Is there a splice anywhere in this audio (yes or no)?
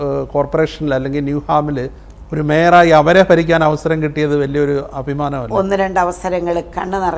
no